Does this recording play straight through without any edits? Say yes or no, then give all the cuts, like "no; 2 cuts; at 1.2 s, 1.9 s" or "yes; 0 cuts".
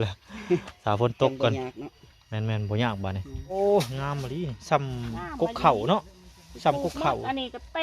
no; 1 cut; at 3.5 s